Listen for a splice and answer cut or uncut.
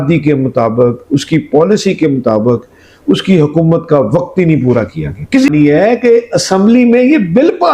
cut